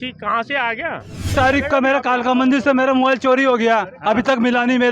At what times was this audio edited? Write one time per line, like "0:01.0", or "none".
0:01.3